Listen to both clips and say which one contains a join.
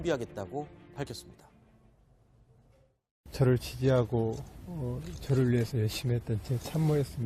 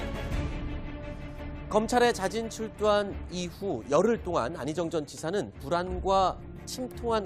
first; 1 cut; at 5.8 s

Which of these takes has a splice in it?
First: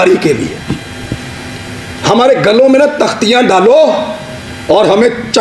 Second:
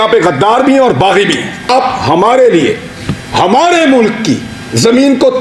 second; 1 cut; at 1.7 s

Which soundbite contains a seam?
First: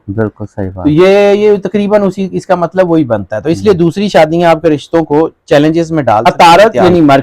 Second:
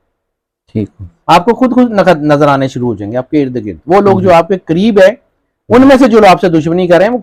first; 1 cut; at 6.3 s

